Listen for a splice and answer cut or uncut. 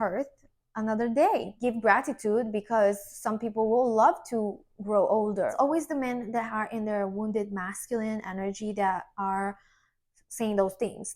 cut